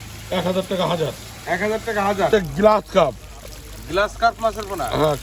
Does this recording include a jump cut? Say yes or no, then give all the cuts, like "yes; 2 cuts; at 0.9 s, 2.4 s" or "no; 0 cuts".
yes; 1 cut; at 2.3 s